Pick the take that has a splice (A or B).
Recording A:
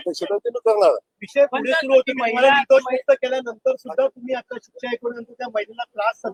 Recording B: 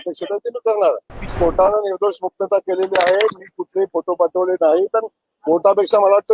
B